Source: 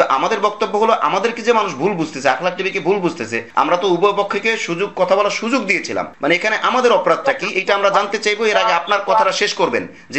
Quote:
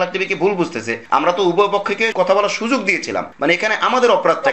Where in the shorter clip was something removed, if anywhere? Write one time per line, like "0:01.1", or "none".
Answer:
0:02.1